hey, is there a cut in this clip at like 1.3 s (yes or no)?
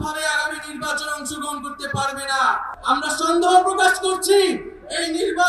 no